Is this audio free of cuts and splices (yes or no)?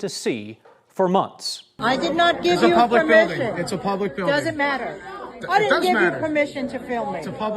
no